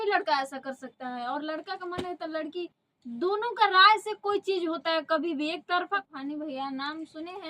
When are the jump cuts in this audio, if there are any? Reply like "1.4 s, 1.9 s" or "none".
6.0 s